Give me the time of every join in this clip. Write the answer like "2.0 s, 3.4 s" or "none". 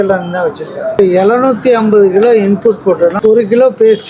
1.0 s, 3.2 s